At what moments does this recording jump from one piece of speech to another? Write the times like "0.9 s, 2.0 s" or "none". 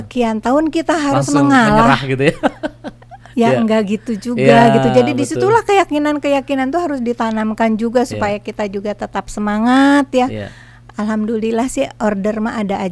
none